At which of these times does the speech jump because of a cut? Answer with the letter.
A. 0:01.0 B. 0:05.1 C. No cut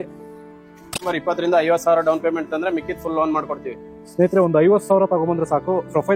A